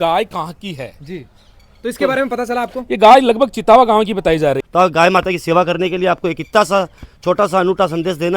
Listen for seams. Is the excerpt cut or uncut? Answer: cut